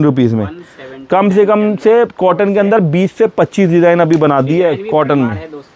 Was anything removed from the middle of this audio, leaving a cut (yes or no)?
no